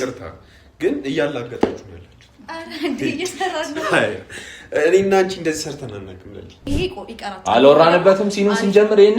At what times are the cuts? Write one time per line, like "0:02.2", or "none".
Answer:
0:06.7